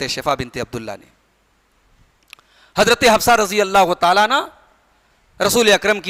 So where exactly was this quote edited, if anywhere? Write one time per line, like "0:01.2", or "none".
none